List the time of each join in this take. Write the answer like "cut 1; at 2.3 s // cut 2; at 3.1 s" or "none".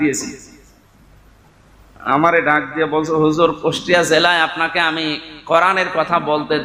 none